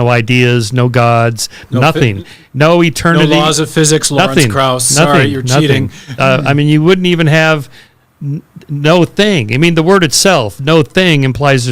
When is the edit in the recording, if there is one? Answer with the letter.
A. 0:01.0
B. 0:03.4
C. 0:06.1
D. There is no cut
C